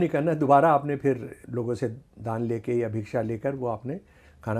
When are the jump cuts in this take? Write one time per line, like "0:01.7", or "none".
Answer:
0:01.4